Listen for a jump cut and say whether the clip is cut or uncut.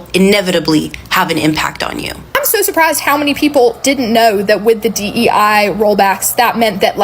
cut